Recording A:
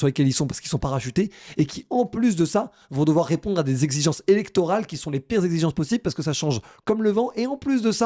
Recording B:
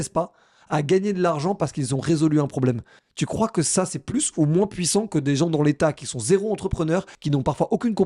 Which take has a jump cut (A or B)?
B